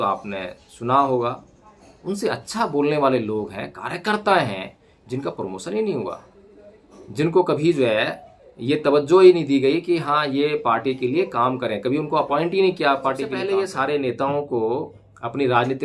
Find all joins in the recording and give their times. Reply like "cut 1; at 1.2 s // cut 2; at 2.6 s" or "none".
cut 1; at 13.4 s